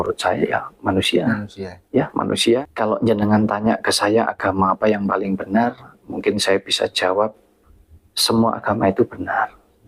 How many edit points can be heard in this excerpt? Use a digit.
1